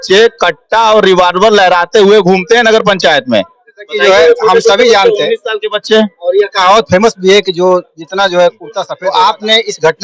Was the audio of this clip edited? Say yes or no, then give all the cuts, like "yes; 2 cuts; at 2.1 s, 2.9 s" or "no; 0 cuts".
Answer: no; 0 cuts